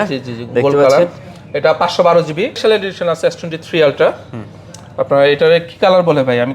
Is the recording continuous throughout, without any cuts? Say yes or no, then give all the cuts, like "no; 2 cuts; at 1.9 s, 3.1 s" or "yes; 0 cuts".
no; 1 cut; at 2.6 s